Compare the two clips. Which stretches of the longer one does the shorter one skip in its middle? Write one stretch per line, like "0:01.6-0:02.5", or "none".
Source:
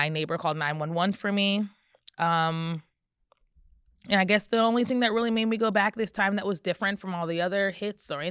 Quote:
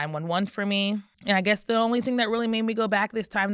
0:01.8-0:04.0